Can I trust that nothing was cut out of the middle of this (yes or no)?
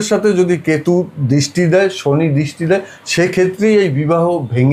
yes